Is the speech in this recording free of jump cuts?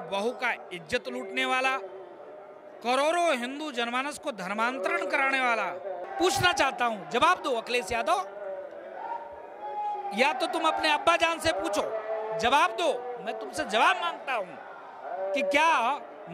no; 1 cut; at 6.0 s

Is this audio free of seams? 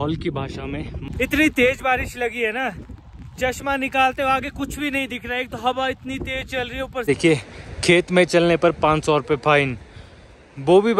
no; 2 cuts; at 1.0 s, 7.0 s

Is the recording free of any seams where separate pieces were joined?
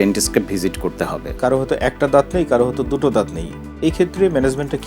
no; 1 cut; at 1.3 s

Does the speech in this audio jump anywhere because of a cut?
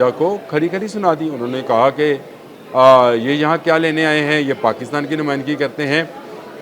no; 0 cuts

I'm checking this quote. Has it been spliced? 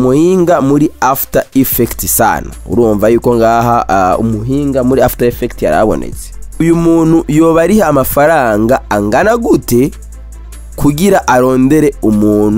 yes; 1 cut; at 6.6 s

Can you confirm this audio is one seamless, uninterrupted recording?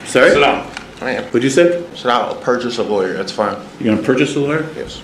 no; 2 cuts; at 1.2 s, 1.9 s

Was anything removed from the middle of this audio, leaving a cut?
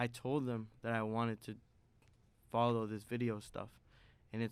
no; 0 cuts

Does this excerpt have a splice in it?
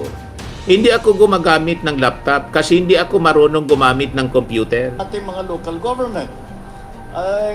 yes; 1 cut; at 5.1 s

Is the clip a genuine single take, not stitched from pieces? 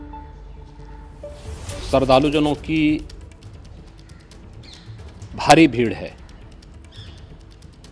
no; 1 cut; at 1.9 s

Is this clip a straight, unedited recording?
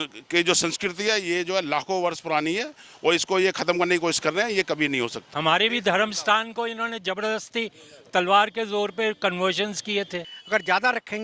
no; 2 cuts; at 5.2 s, 10.3 s

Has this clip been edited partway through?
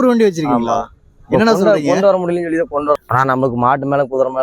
yes; 1 cut; at 3.0 s

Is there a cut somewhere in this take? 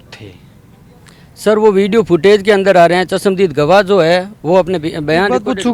no; 0 cuts

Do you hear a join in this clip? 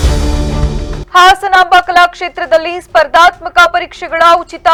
no; 0 cuts

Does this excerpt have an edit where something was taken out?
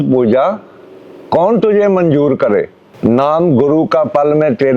yes; 1 cut; at 2.8 s

